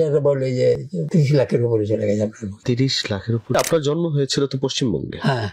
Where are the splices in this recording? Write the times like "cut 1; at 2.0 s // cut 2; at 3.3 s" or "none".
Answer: cut 1; at 0.9 s // cut 2; at 2.5 s // cut 3; at 3.6 s